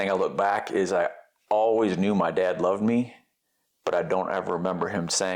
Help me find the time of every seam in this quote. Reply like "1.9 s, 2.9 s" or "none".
none